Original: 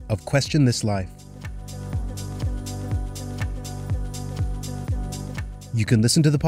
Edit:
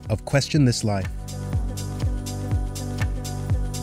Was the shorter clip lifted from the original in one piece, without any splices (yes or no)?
no